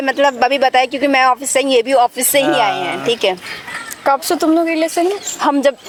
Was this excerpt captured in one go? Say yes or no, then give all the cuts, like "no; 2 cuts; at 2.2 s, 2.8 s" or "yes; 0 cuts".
yes; 0 cuts